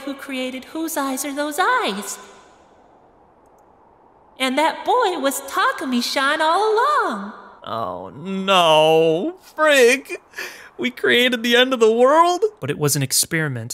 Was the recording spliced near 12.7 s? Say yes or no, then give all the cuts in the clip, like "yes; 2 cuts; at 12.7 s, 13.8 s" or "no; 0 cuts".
yes; 1 cut; at 12.7 s